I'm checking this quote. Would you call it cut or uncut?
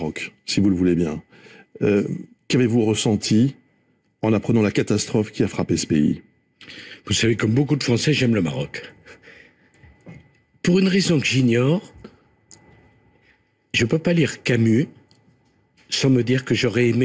uncut